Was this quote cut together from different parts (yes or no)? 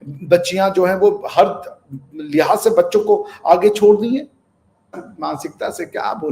yes